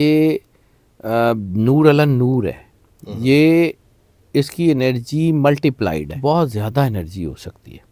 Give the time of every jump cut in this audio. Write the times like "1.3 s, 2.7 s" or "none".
6.1 s